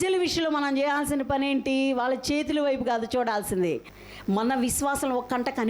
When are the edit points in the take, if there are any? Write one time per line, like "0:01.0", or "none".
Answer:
0:03.9